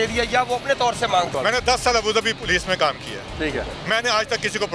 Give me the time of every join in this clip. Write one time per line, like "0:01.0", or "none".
0:01.3
0:03.8